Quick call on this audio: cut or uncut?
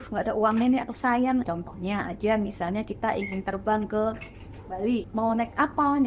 cut